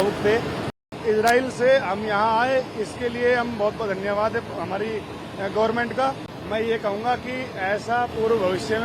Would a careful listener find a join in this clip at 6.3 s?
yes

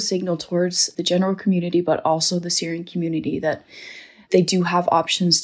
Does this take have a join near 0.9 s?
yes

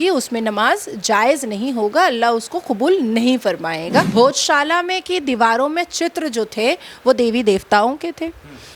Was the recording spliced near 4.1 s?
yes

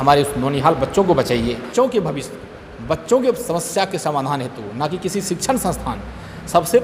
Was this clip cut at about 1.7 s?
yes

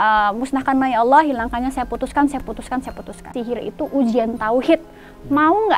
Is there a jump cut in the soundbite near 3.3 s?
yes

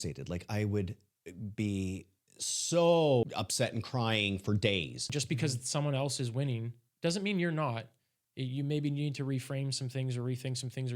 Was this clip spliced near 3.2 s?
yes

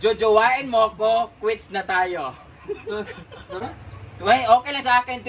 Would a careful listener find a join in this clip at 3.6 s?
yes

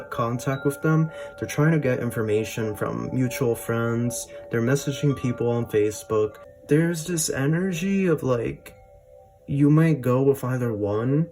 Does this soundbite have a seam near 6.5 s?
yes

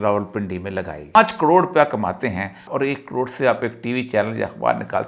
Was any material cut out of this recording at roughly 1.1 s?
yes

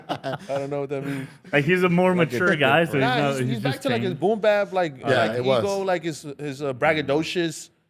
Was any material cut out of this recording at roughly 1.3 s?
no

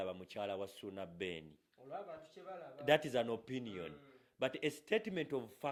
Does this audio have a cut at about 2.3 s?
no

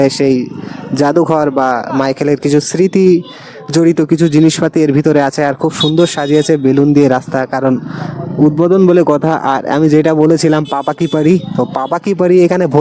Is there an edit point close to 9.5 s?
no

